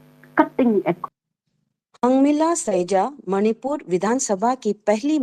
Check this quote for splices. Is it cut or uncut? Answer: cut